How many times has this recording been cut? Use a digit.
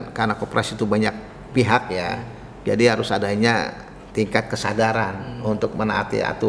0